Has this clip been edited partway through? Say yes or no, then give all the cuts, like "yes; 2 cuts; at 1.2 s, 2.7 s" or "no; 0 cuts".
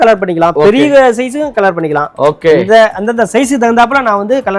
no; 0 cuts